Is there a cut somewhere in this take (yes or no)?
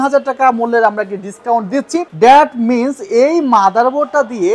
yes